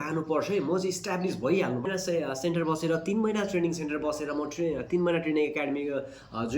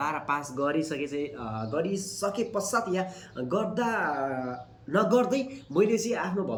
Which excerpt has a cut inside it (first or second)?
first